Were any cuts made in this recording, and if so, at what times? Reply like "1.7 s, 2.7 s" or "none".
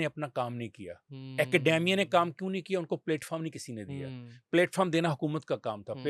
none